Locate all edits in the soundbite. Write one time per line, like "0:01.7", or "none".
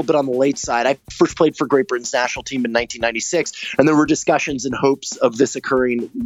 none